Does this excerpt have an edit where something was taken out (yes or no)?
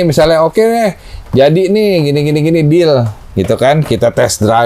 no